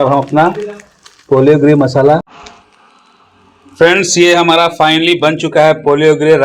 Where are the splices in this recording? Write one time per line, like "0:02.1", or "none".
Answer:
0:02.4